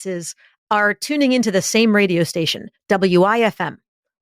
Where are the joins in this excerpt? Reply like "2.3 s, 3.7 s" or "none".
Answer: none